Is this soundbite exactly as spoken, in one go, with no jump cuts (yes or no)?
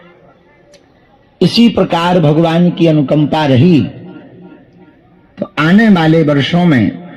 yes